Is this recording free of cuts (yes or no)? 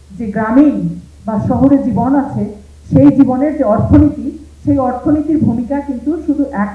yes